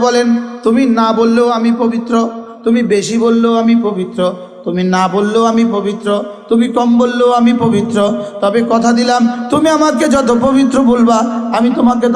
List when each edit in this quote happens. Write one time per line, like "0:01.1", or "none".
none